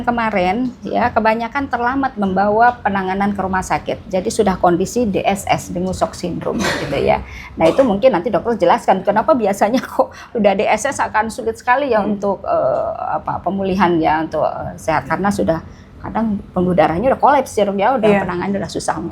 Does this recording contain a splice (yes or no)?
no